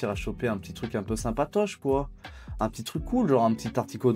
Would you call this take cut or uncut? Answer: uncut